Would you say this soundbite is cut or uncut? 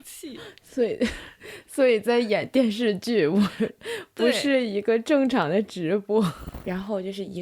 cut